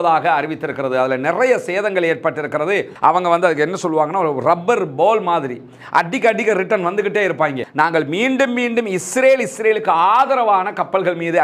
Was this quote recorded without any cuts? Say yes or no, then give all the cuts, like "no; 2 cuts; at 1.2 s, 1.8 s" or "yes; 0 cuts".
no; 2 cuts; at 2.9 s, 7.6 s